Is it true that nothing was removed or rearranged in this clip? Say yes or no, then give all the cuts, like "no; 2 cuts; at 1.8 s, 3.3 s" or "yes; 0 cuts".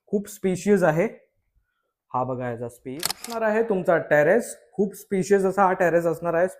no; 1 cut; at 3.4 s